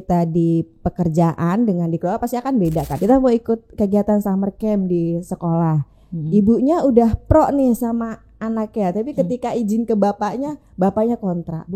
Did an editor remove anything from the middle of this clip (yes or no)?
yes